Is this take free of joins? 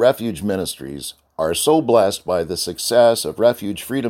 yes; 0 cuts

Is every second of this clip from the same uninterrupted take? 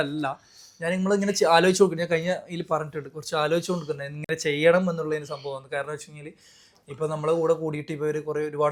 yes; 0 cuts

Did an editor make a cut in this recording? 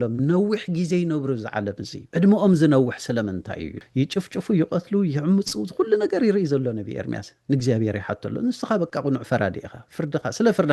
yes; 2 cuts; at 1.9 s, 3.8 s

